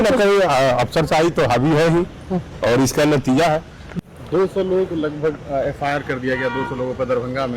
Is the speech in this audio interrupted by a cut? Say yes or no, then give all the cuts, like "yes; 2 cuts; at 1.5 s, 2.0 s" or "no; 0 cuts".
yes; 1 cut; at 4.0 s